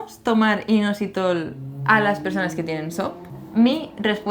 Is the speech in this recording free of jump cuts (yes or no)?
yes